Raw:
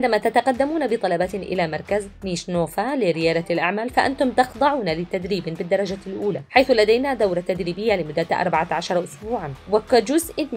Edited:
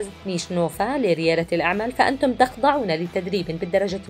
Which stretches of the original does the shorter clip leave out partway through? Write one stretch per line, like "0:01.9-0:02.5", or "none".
none